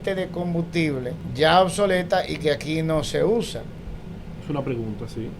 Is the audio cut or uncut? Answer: cut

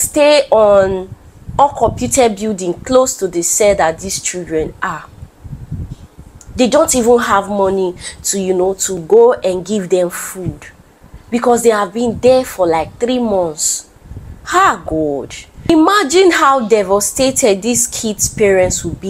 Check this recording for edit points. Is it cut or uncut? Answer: uncut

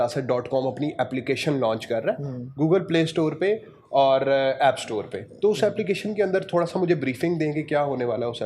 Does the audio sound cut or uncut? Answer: uncut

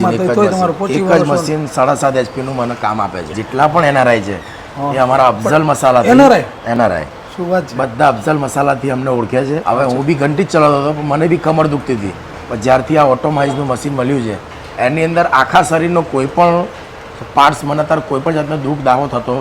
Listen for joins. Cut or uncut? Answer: cut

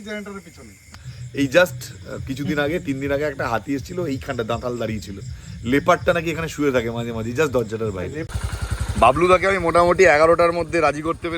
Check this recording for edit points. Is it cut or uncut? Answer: cut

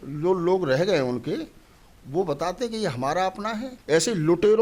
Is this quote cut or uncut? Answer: cut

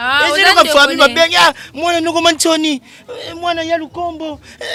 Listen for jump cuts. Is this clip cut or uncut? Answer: uncut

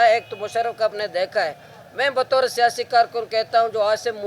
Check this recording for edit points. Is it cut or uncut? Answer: uncut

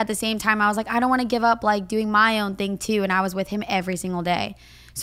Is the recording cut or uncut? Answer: uncut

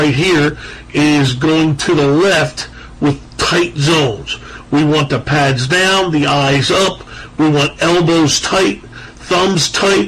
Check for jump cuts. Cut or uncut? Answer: uncut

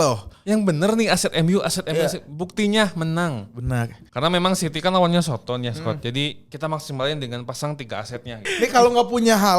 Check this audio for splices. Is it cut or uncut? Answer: cut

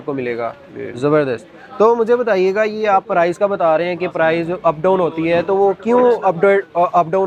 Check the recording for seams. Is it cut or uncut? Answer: uncut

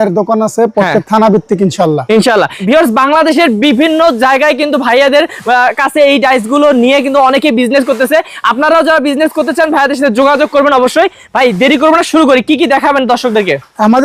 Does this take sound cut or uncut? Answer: uncut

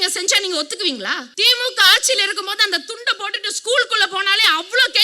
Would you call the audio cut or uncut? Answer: cut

